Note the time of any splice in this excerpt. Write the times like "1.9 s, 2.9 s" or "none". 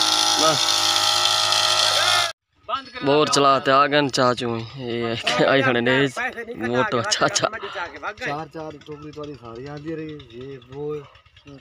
2.4 s